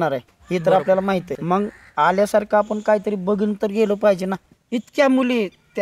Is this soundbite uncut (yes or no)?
no